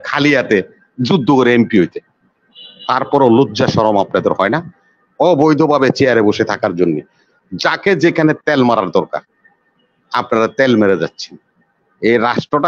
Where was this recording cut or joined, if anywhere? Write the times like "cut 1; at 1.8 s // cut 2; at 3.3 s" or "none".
cut 1; at 2.5 s